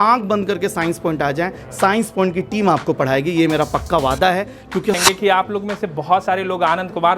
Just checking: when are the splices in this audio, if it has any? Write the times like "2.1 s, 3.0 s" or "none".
5.0 s